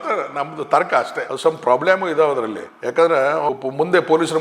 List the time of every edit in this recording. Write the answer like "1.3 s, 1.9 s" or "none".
1.3 s, 3.5 s

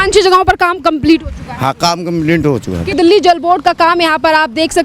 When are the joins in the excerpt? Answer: 2.9 s

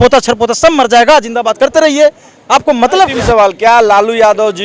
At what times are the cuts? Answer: 3.1 s

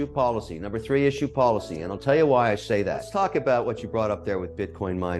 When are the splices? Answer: 3.0 s

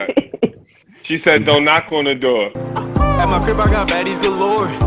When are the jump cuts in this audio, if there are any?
2.6 s

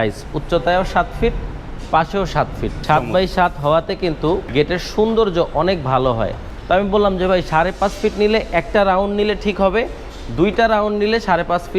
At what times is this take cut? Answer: 2.7 s, 4.5 s, 6.5 s

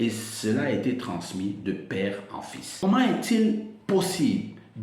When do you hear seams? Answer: 2.7 s

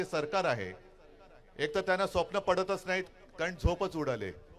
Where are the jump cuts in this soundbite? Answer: none

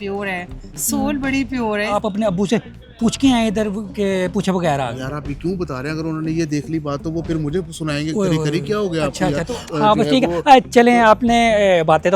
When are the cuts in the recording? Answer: 1.9 s, 9.6 s

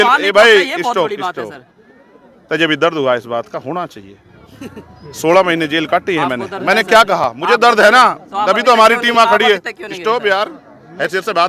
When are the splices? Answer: none

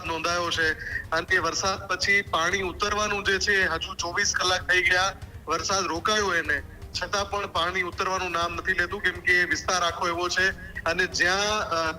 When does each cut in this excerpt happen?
none

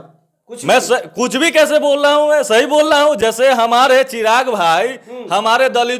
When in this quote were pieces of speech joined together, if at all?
none

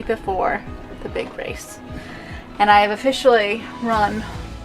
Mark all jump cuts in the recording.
none

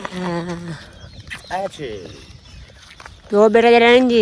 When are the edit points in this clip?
none

